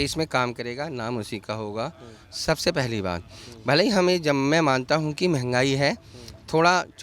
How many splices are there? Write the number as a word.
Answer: zero